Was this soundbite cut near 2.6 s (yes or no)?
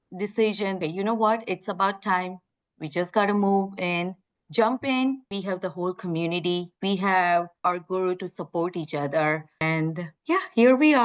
no